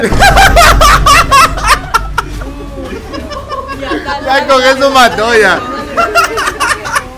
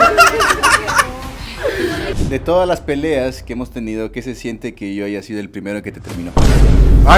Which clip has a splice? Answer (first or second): second